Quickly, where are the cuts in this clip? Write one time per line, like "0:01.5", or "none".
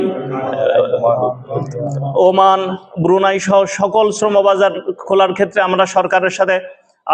none